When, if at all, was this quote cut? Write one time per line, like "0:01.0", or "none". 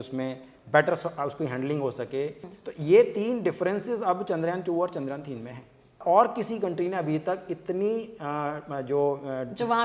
0:02.6
0:06.0